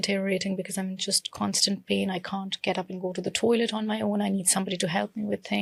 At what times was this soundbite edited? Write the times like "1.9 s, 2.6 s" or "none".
none